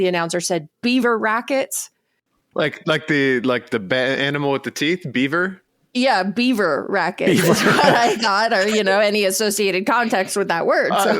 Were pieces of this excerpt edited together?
no; 0 cuts

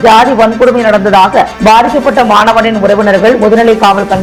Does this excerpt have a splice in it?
no; 0 cuts

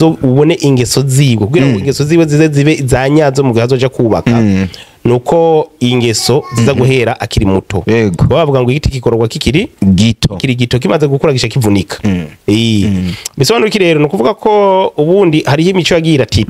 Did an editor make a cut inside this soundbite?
no; 0 cuts

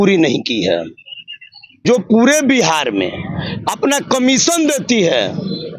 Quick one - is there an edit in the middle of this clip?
yes; 1 cut; at 1.8 s

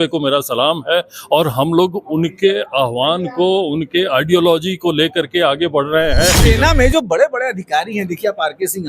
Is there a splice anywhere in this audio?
yes; 1 cut; at 6.4 s

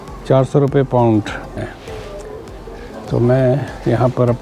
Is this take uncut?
no; 1 cut; at 1.7 s

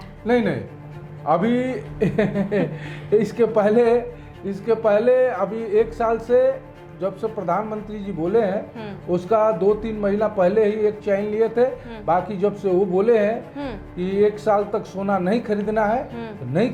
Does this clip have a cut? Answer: no; 0 cuts

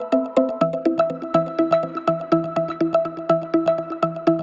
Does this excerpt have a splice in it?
no; 0 cuts

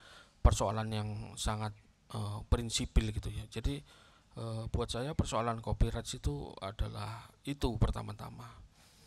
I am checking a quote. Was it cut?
no; 0 cuts

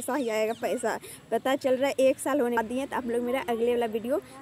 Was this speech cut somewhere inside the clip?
yes; 1 cut; at 2.6 s

